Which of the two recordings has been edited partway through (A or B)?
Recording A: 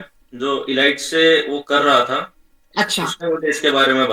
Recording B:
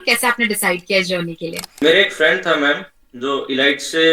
B